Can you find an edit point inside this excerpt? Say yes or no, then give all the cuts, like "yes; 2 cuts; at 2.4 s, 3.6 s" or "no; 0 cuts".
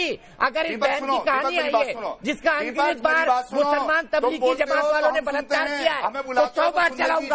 no; 0 cuts